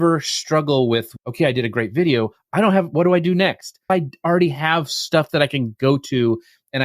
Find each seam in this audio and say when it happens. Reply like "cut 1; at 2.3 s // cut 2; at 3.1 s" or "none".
cut 1; at 1.2 s // cut 2; at 3.9 s